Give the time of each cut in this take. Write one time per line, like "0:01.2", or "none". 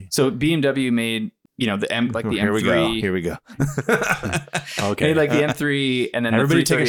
0:01.4

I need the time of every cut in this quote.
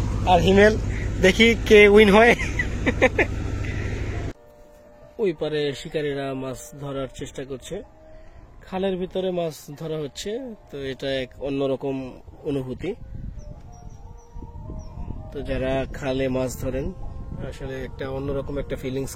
0:04.3

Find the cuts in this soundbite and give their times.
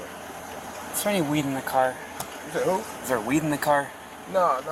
none

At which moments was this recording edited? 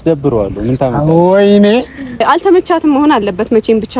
0:02.2

